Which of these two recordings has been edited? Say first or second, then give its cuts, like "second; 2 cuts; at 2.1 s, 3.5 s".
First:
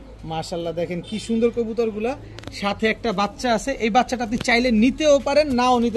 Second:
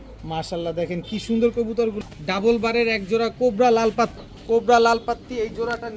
second; 2 cuts; at 2.0 s, 4.1 s